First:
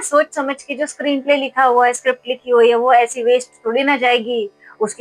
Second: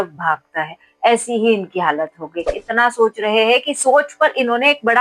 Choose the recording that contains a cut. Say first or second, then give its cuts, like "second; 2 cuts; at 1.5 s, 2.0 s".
second; 1 cut; at 2.6 s